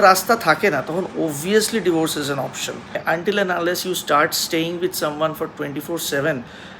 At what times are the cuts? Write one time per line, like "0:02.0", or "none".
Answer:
0:03.0